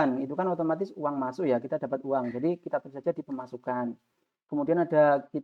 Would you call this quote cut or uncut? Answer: uncut